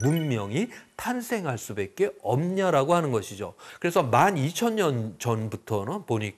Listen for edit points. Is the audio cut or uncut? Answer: cut